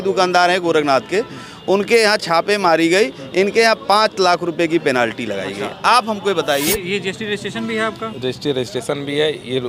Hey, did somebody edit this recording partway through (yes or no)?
yes